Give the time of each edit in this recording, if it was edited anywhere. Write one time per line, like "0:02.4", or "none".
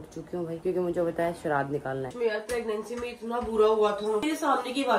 0:02.1
0:04.2